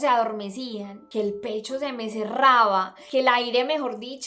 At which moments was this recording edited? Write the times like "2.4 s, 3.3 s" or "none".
1.0 s, 3.0 s